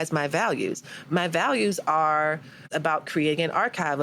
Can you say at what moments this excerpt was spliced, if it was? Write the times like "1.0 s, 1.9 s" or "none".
2.7 s